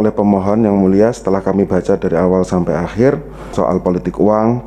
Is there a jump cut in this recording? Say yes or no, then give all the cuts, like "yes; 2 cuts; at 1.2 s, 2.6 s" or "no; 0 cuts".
yes; 1 cut; at 3.5 s